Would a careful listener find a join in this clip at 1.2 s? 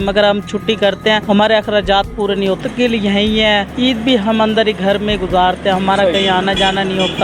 yes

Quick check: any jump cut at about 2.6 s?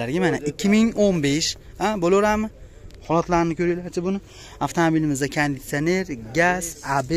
no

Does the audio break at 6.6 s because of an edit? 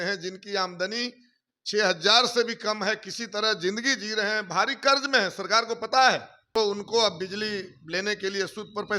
yes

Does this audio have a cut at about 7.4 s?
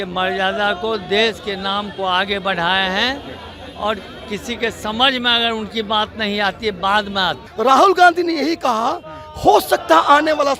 yes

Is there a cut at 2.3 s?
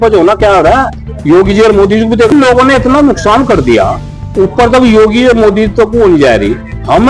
yes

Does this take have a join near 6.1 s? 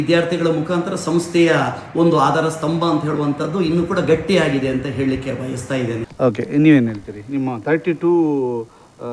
yes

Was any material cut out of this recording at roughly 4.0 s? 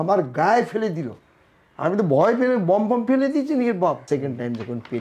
yes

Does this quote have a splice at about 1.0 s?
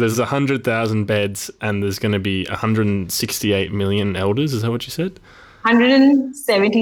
yes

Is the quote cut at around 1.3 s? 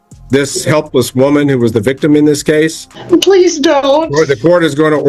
no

